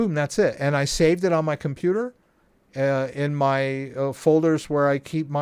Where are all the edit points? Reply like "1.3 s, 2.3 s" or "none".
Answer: none

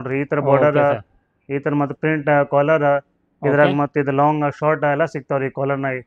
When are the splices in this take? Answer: none

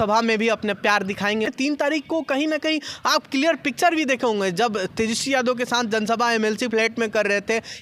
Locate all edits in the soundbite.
1.5 s

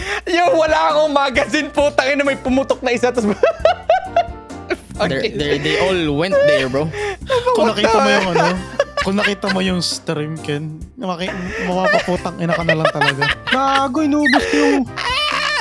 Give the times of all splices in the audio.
none

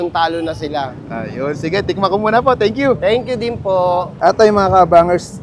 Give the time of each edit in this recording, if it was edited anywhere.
none

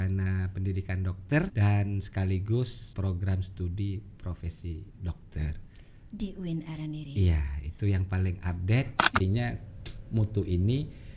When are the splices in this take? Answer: 1.5 s, 2.8 s, 9.2 s

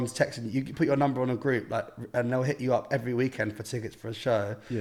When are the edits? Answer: none

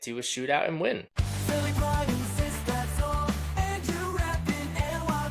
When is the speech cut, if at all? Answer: 1.1 s

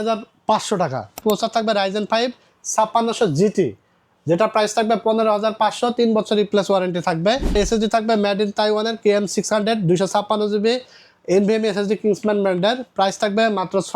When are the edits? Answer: 1.2 s, 7.5 s

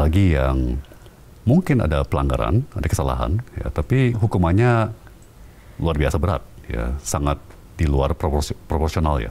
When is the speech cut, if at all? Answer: none

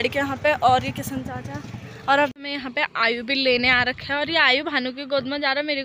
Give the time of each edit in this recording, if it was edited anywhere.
2.3 s

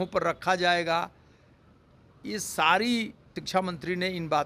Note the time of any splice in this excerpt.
3.3 s

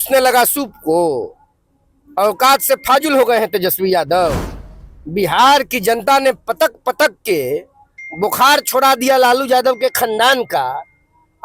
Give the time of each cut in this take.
none

